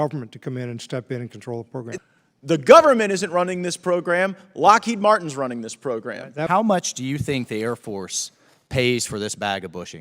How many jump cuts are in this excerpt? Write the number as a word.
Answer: two